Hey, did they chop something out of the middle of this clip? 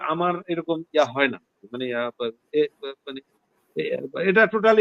no; 0 cuts

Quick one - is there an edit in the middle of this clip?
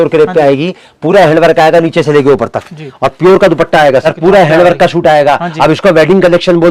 yes; 1 cut; at 4.0 s

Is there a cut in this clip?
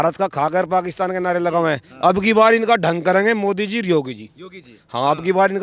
no; 0 cuts

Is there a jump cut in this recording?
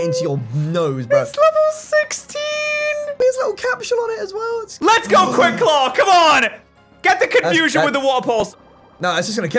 yes; 1 cut; at 4.7 s

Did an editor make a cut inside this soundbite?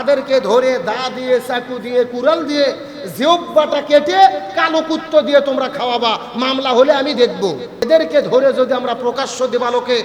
yes; 1 cut; at 7.9 s

